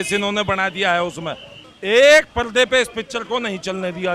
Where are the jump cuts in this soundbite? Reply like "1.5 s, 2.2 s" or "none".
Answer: 1.6 s